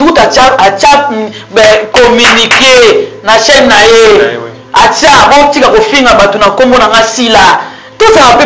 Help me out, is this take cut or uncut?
uncut